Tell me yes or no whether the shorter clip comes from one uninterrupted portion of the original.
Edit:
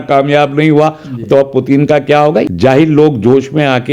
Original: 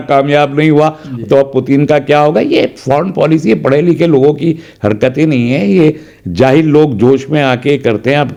no